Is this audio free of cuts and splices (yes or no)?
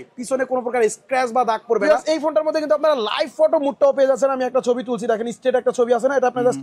no